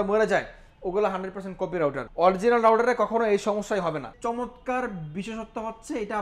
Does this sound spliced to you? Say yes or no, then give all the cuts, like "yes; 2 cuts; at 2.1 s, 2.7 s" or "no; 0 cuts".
yes; 2 cuts; at 2.0 s, 4.1 s